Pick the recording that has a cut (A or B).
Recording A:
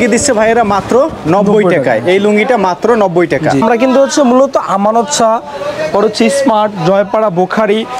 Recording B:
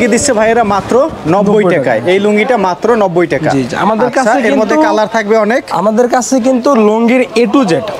A